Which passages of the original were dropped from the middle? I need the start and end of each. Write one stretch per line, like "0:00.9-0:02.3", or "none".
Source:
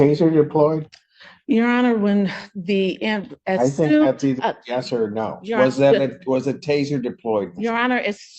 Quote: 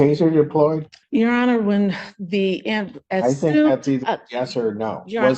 0:00.9-0:01.3